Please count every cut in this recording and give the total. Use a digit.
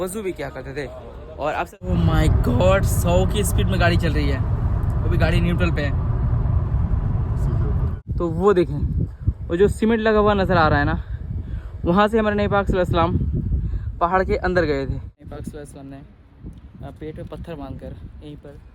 3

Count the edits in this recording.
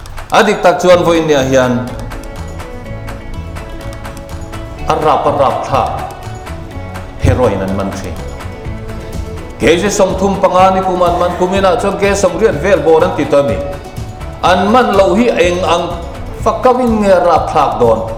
0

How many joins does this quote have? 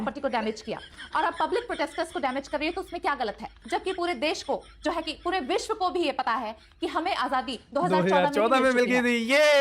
1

